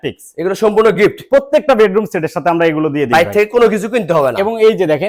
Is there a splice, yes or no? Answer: no